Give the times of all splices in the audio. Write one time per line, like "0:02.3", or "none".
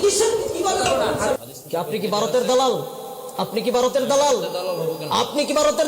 0:01.4